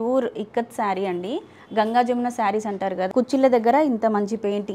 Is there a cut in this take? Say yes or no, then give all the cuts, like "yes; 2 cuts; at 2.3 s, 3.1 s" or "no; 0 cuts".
yes; 1 cut; at 3.1 s